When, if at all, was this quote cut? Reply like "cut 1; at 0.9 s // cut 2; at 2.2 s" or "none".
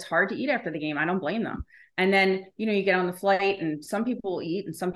none

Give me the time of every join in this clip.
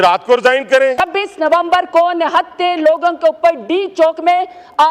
cut 1; at 1.0 s

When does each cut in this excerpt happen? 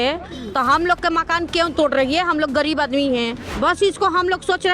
cut 1; at 3.4 s

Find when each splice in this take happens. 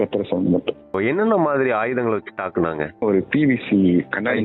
cut 1; at 0.9 s // cut 2; at 3.0 s

